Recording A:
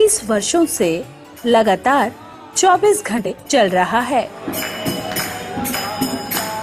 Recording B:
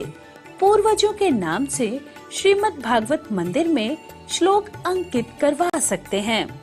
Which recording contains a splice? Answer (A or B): A